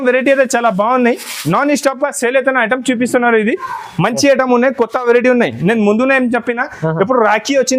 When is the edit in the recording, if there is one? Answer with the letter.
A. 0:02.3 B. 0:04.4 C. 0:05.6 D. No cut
D